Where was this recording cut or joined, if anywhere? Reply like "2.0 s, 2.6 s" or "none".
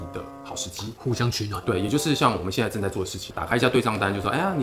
3.3 s